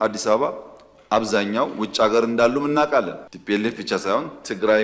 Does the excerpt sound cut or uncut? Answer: cut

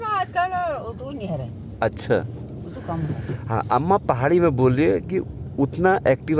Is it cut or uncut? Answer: uncut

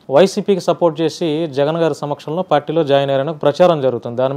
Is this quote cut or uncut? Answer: uncut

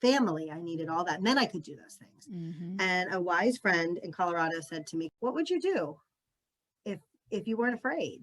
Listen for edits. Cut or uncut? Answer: cut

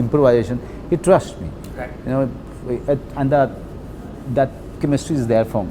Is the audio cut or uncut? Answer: uncut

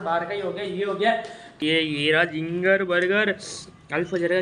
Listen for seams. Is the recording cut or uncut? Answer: cut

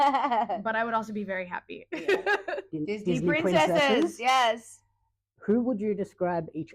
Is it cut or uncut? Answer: cut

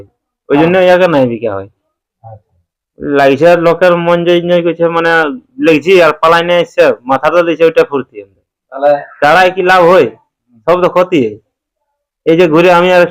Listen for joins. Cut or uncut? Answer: uncut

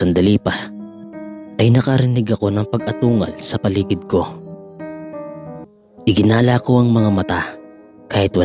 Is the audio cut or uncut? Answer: cut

